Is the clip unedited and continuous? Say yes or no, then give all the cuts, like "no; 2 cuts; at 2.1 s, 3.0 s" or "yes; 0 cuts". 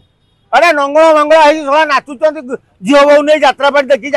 yes; 0 cuts